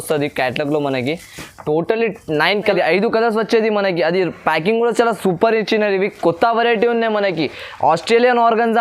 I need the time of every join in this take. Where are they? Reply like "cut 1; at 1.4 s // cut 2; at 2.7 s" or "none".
cut 1; at 2.6 s